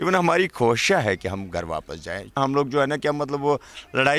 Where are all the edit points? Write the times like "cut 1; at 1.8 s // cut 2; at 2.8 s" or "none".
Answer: cut 1; at 2.4 s